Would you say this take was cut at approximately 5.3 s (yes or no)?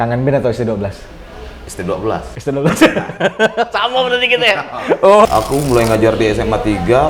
yes